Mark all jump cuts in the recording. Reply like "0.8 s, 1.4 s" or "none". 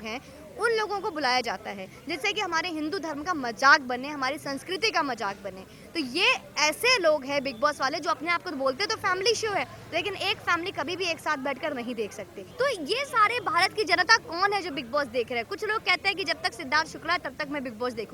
12.4 s